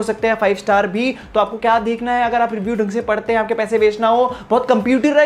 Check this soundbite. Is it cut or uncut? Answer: uncut